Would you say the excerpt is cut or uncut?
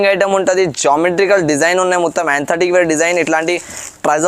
uncut